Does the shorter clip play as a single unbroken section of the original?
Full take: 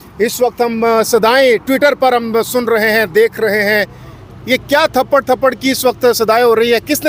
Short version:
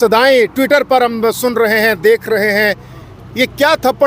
yes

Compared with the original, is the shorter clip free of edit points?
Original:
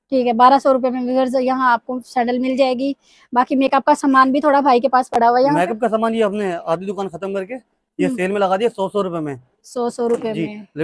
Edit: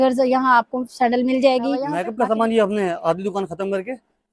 no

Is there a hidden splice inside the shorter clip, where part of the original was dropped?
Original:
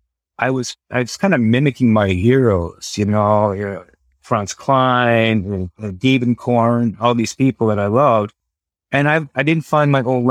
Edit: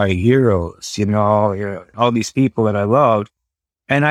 yes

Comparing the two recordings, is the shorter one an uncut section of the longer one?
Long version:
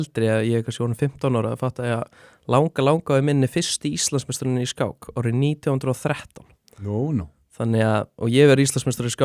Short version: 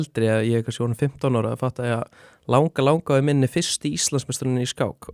yes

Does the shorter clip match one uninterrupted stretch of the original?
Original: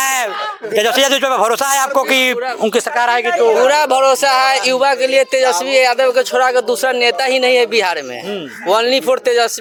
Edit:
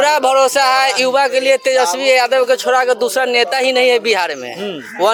yes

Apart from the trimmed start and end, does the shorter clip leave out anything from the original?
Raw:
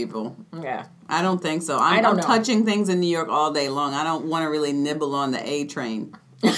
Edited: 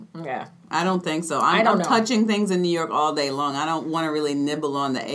no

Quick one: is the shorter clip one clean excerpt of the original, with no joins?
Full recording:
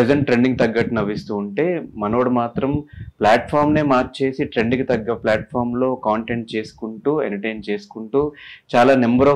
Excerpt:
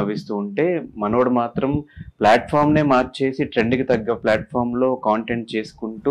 yes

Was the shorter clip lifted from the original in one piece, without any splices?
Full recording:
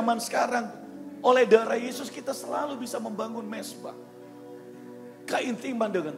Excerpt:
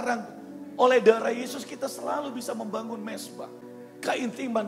no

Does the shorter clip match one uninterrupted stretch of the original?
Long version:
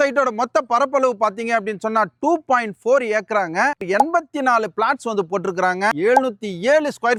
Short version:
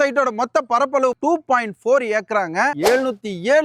no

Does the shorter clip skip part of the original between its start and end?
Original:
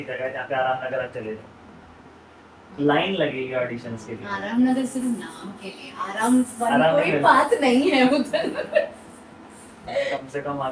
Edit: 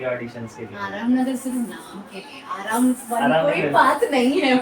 no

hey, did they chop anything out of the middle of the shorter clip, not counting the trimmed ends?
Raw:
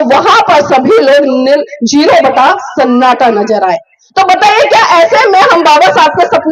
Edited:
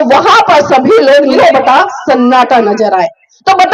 yes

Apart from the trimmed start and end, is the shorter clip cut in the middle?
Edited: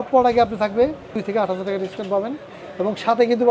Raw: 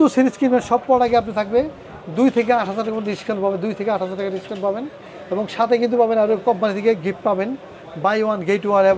yes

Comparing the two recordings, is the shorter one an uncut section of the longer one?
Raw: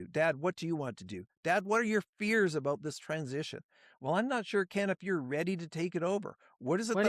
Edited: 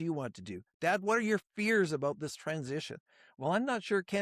yes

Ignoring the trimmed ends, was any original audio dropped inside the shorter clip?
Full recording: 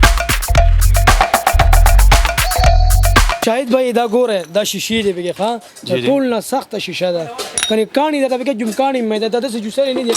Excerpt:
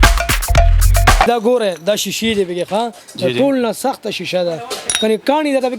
yes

